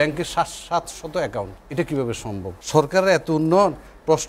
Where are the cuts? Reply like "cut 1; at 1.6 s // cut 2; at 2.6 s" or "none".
cut 1; at 1.6 s // cut 2; at 2.5 s